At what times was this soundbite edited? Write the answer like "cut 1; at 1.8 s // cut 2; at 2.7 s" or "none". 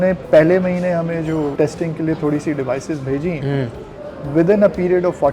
cut 1; at 1.5 s